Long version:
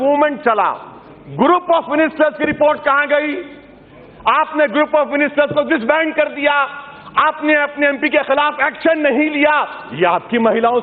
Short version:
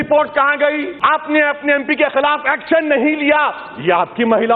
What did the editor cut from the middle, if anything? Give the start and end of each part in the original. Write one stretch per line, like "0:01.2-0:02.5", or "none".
0:03.4-0:07.0